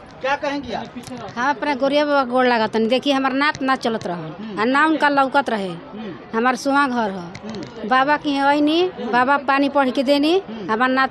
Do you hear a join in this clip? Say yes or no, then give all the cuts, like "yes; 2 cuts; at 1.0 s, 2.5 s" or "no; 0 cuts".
no; 0 cuts